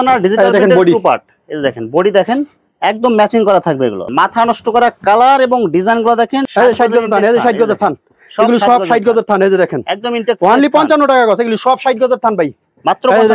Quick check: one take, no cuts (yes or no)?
no